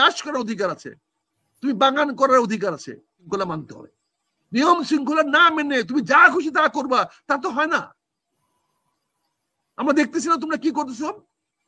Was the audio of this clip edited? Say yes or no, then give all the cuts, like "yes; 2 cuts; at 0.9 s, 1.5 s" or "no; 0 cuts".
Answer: yes; 1 cut; at 3.2 s